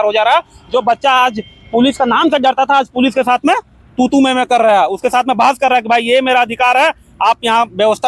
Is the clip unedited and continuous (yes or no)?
yes